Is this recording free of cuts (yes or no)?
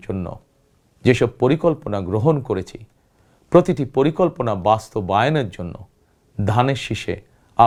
yes